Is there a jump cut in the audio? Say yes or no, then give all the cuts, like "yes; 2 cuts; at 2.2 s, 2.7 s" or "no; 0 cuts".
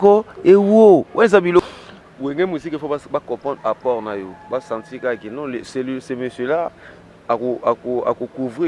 yes; 1 cut; at 1.6 s